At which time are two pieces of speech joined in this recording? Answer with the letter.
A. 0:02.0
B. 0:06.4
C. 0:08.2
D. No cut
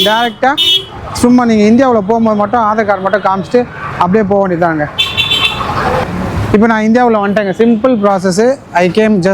B